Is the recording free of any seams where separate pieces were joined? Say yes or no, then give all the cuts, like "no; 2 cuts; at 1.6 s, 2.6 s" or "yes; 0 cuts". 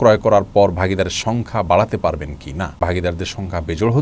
no; 1 cut; at 2.7 s